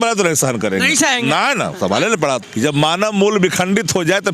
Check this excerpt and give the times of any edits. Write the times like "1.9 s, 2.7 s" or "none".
2.4 s